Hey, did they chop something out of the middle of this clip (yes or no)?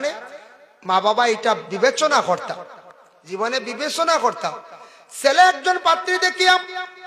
no